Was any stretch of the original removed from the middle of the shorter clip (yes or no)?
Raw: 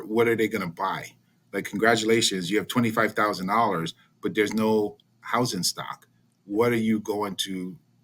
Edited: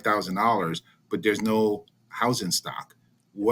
no